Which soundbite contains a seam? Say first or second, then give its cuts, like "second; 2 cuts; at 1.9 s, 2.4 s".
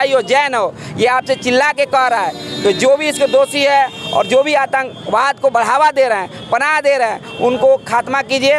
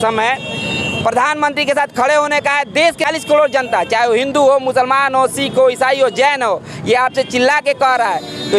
second; 1 cut; at 3.1 s